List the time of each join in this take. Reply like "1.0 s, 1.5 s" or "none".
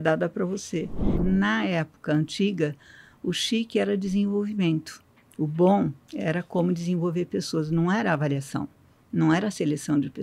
1.2 s

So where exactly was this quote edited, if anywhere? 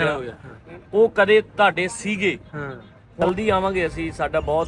3.2 s

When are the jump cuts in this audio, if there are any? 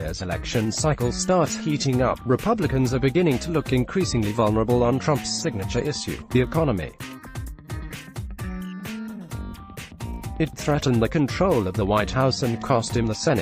6.9 s, 8.9 s, 10.6 s, 12.5 s

